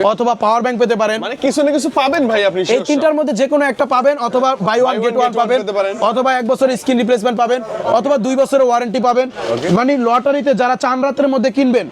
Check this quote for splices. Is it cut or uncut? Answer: uncut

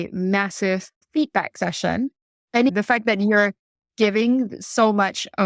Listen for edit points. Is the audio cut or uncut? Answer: cut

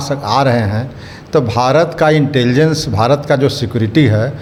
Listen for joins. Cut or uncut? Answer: uncut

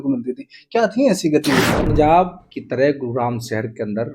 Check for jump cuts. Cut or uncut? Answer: cut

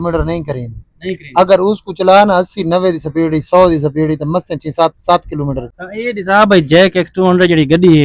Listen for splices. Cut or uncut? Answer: cut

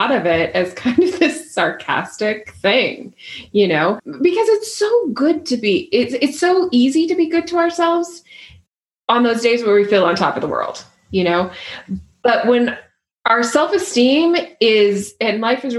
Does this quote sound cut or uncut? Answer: uncut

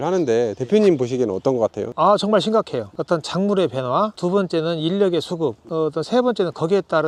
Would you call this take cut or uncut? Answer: uncut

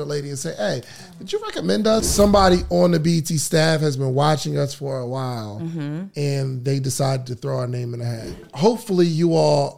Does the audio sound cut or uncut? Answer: cut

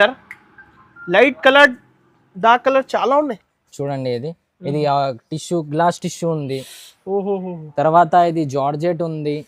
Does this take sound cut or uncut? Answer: uncut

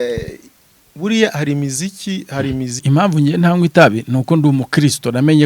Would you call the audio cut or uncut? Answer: cut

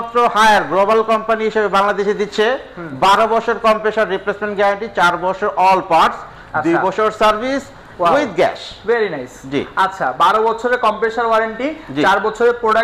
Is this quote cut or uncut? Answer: uncut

